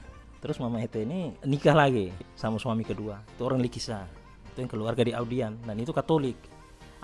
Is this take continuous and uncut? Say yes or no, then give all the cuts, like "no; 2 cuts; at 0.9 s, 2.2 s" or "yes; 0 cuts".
no; 2 cuts; at 1.4 s, 2.2 s